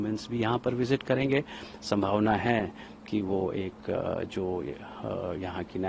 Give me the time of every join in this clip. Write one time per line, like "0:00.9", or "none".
none